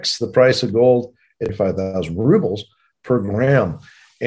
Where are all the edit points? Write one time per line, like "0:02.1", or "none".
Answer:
0:01.5